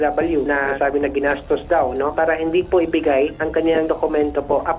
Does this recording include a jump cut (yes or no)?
yes